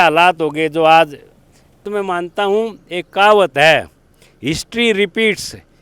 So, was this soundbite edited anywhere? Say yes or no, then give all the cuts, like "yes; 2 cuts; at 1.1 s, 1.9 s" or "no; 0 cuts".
yes; 1 cut; at 1.9 s